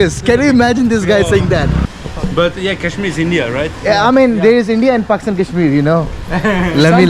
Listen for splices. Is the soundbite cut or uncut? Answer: cut